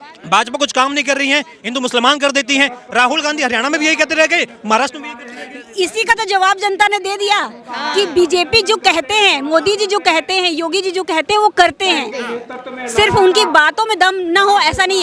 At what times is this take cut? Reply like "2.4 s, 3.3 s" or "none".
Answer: none